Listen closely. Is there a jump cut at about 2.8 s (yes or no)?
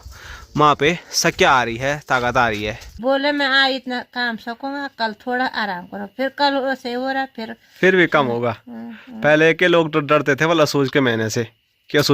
yes